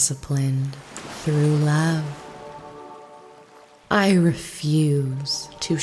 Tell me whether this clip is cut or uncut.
cut